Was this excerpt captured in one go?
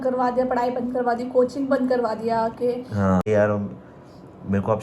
no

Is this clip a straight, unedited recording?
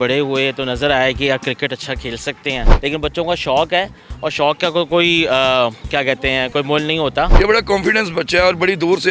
no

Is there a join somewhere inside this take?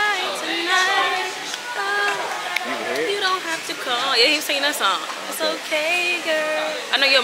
no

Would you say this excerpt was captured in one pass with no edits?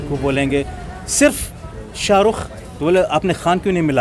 yes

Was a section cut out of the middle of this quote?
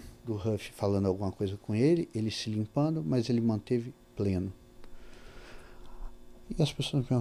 no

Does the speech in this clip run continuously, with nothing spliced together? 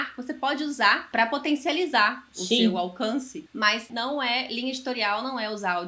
no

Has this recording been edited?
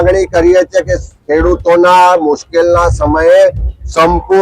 no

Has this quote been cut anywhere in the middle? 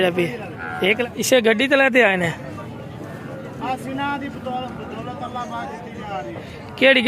yes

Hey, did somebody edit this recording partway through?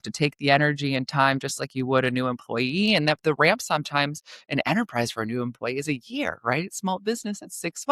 no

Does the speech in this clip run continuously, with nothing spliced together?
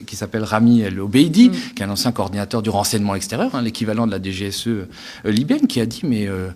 yes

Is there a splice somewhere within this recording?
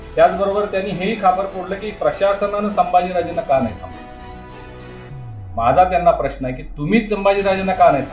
no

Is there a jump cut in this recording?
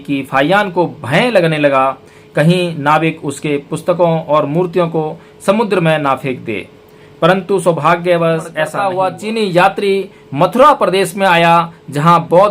yes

